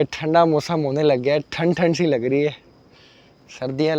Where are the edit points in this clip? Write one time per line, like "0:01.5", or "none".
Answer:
none

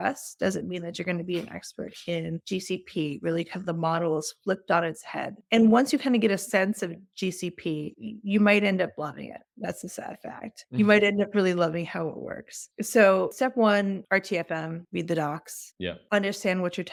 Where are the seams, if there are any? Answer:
none

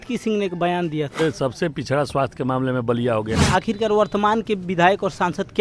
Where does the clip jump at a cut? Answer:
0:01.2
0:03.4

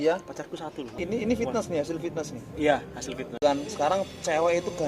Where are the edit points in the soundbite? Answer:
0:01.0
0:03.4

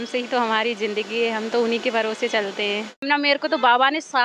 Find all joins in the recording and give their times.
0:03.0

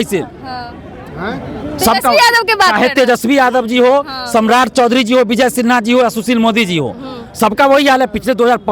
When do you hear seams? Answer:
none

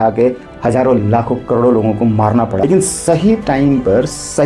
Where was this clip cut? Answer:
0:02.6

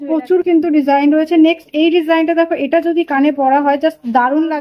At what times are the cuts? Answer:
none

